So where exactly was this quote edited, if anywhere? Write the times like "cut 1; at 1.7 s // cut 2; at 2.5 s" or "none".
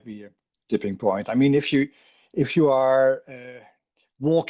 none